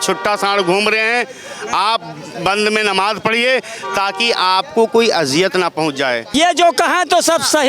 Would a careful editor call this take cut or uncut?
cut